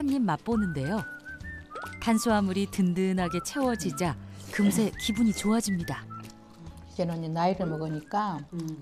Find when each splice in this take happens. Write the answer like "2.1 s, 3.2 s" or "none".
none